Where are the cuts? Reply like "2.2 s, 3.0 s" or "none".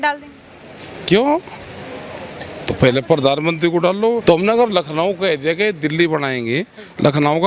4.2 s